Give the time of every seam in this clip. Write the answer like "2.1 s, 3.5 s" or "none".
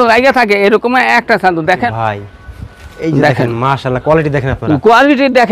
1.9 s